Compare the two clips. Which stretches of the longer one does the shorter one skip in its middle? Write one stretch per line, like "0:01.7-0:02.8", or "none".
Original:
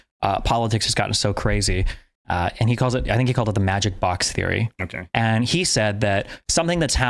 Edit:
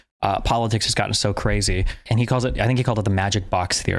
0:02.1-0:02.6